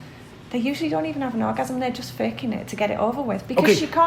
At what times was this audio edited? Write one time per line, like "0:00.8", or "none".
none